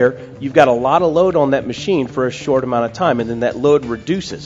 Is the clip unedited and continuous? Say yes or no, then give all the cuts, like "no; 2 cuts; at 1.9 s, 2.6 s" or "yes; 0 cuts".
yes; 0 cuts